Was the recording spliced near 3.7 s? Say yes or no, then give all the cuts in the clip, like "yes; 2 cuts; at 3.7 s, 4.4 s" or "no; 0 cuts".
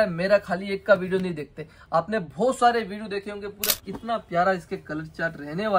yes; 1 cut; at 3.7 s